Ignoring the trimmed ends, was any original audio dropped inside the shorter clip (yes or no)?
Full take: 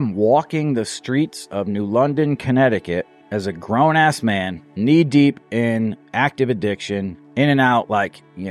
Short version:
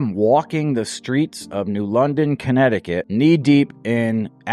yes